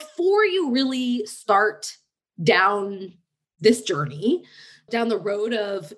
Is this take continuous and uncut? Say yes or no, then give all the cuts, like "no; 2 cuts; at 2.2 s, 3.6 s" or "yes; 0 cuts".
yes; 0 cuts